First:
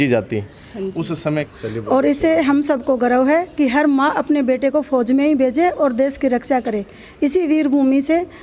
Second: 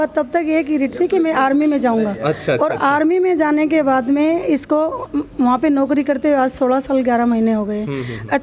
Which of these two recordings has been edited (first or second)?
first